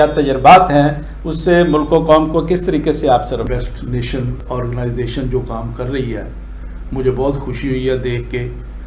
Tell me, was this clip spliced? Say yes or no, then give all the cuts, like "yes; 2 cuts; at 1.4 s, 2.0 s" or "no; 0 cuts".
yes; 1 cut; at 3.4 s